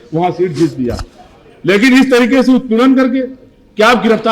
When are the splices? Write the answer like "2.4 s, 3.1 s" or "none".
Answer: none

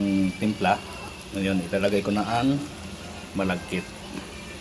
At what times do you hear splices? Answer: none

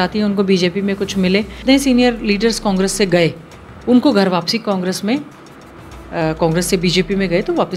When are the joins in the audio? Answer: 1.6 s

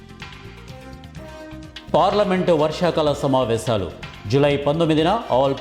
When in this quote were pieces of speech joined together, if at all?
1.8 s

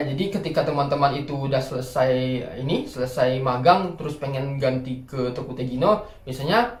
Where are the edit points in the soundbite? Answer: none

